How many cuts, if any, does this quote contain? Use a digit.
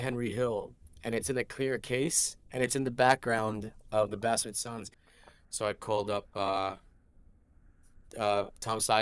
1